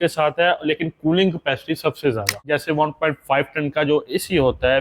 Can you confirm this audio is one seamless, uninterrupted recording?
no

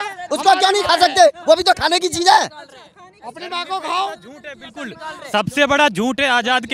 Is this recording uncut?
yes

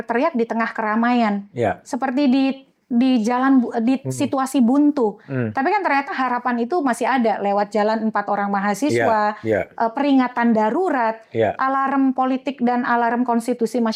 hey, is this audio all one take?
yes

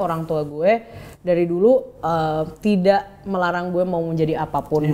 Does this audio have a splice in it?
no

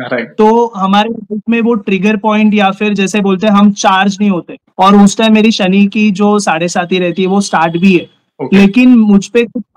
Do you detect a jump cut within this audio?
yes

